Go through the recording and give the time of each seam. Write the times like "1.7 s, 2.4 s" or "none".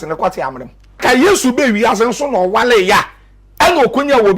1.0 s

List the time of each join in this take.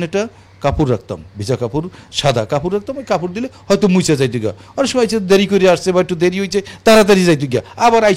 none

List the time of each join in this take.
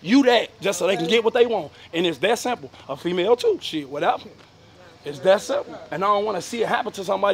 none

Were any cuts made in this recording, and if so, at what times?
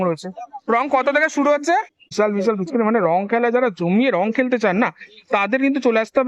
2.1 s

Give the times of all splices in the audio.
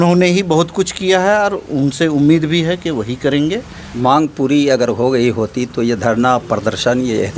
3.8 s

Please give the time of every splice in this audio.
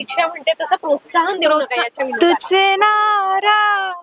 2.1 s

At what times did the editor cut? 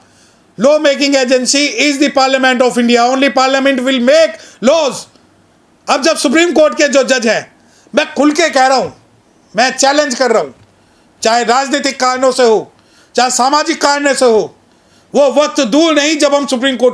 none

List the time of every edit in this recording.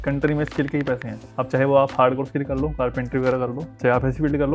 1.2 s, 3.7 s

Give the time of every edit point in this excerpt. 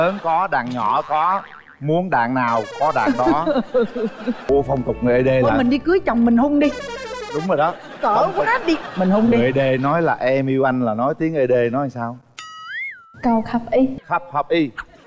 4.4 s

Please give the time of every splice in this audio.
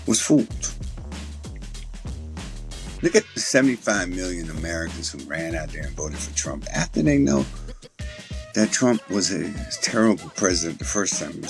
0.8 s, 2.3 s

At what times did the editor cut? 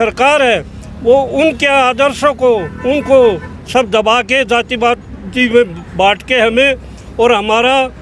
none

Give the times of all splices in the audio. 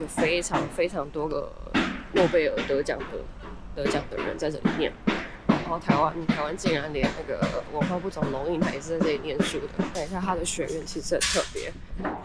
none

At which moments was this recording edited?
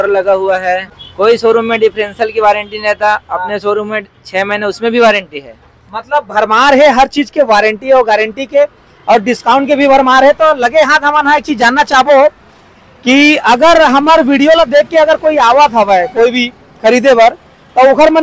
1.0 s

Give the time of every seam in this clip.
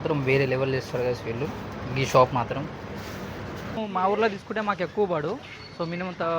3.8 s

